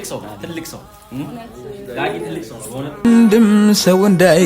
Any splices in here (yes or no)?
yes